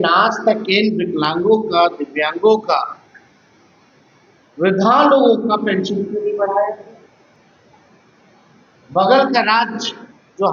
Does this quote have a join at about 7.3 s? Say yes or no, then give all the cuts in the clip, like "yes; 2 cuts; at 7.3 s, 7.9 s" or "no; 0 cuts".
no; 0 cuts